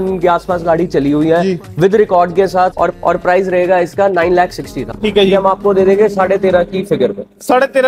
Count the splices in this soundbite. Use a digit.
2